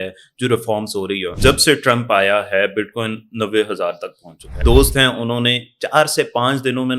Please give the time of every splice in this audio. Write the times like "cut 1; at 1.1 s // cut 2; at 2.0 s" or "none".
cut 1; at 1.3 s // cut 2; at 4.6 s